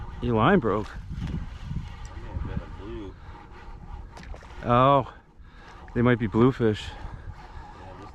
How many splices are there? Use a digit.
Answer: 0